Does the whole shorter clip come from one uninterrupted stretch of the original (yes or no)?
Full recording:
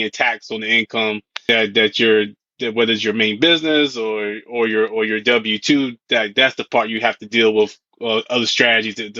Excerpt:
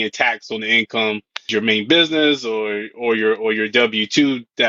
no